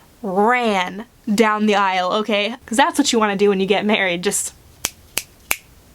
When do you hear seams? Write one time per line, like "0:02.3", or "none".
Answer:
0:02.5